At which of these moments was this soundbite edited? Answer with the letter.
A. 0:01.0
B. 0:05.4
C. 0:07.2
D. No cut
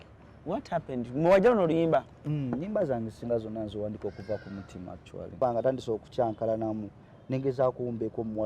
B